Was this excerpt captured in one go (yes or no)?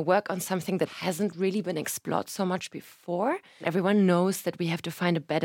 no